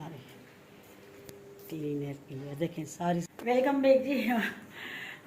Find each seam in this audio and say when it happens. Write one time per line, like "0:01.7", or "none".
0:03.3